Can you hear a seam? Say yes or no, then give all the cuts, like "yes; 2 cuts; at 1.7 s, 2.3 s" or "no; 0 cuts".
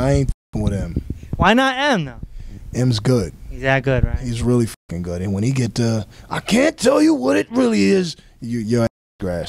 no; 0 cuts